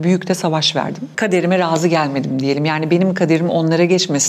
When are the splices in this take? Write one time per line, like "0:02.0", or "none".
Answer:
0:01.0